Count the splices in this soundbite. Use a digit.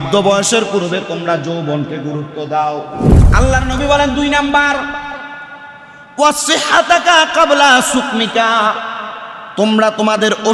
1